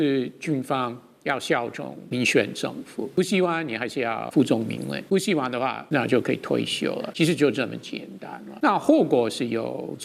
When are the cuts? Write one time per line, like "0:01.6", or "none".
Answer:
0:02.0
0:03.2
0:04.3
0:05.0
0:05.8
0:07.1
0:08.5